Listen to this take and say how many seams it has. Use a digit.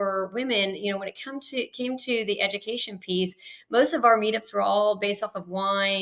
0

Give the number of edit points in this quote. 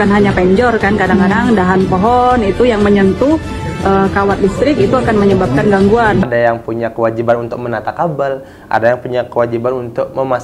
1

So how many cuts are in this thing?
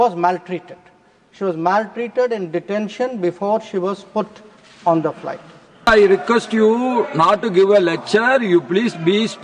1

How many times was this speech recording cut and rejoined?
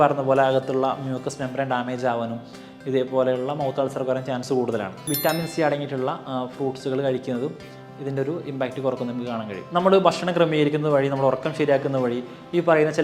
1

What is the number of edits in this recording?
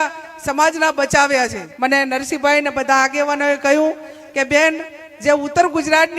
1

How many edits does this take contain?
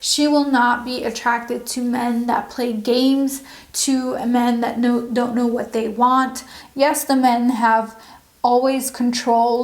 1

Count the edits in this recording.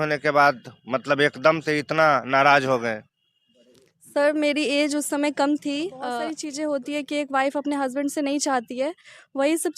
1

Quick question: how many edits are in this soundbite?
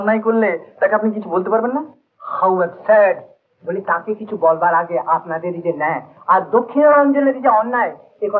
0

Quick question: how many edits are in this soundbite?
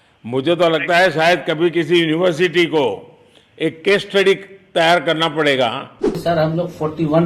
1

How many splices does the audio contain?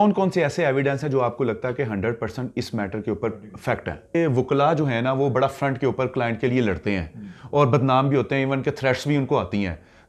1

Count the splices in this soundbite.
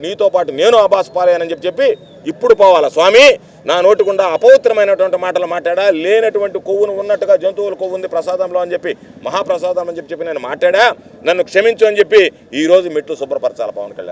0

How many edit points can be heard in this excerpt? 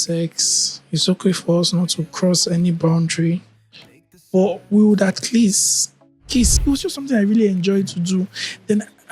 1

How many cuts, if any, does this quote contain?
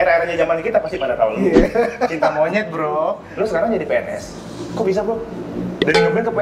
1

